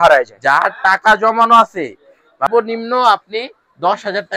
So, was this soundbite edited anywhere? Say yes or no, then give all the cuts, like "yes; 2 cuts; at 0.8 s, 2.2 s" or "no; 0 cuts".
yes; 1 cut; at 2.5 s